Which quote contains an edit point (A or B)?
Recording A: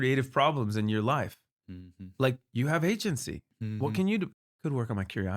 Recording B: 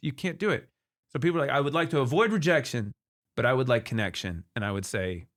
A